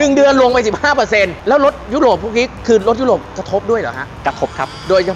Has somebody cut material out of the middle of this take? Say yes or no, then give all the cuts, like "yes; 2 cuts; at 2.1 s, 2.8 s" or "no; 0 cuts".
no; 0 cuts